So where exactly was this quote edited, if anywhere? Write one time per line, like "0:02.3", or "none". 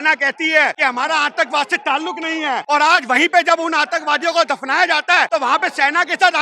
0:00.8
0:02.6
0:05.3